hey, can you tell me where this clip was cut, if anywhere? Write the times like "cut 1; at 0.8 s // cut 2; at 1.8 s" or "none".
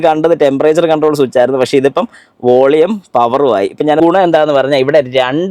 cut 1; at 4.0 s